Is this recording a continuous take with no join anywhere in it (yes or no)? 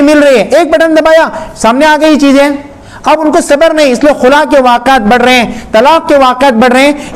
yes